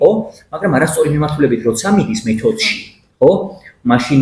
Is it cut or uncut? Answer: uncut